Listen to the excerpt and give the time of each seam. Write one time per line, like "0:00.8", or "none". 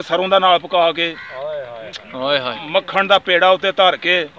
none